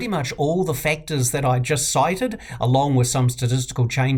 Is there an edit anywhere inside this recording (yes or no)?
no